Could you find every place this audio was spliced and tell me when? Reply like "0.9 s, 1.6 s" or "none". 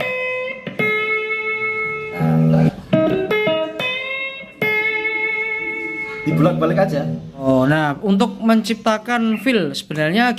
2.7 s, 7.4 s